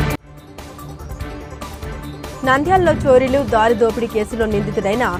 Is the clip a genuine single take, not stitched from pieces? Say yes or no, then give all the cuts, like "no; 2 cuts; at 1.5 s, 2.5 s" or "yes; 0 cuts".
yes; 0 cuts